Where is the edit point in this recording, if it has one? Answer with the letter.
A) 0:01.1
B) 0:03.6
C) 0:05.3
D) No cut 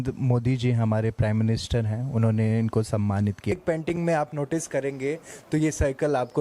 B